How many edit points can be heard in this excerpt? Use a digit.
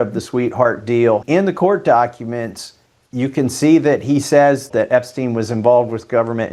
2